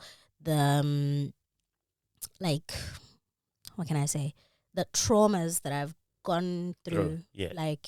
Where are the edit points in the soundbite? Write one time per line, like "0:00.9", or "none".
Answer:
none